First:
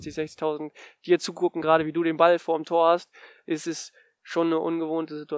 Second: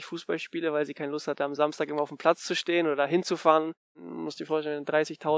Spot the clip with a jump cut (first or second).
second